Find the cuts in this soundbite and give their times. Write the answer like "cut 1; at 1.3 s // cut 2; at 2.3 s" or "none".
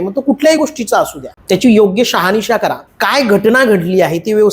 cut 1; at 1.3 s // cut 2; at 2.9 s